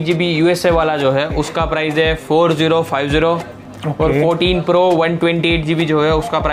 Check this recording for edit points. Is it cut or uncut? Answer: uncut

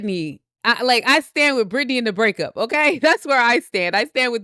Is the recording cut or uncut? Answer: uncut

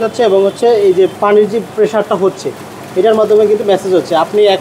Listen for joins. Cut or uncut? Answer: cut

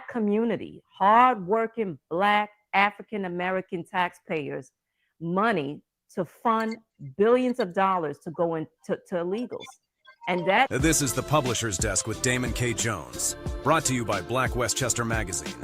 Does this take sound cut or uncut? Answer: cut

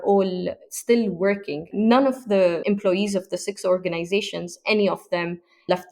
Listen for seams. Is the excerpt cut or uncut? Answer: cut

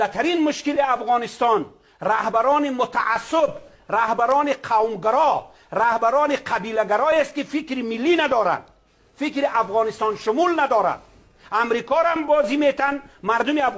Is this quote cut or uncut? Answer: uncut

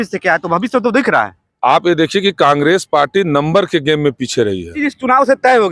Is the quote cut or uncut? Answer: cut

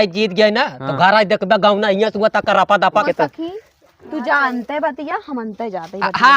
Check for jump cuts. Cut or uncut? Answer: cut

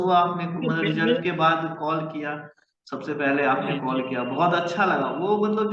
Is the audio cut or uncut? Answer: uncut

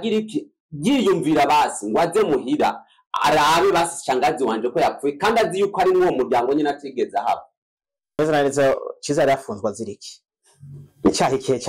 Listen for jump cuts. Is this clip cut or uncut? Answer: cut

